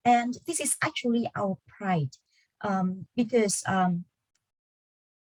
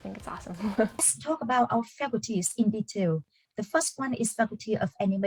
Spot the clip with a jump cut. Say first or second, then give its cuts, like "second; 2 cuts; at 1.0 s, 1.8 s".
second; 1 cut; at 1.1 s